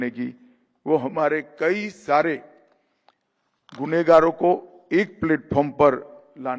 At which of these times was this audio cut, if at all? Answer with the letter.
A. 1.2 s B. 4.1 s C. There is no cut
C